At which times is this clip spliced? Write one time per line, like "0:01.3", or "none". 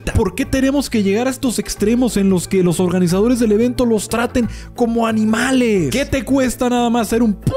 0:05.9